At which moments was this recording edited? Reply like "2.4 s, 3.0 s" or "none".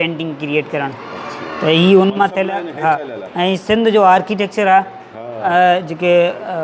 none